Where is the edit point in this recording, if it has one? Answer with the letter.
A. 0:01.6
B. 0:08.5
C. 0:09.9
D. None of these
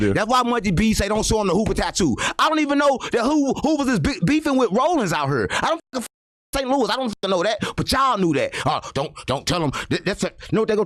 D